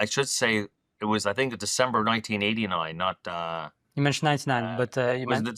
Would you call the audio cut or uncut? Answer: cut